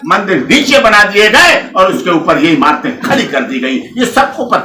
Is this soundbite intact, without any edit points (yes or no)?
yes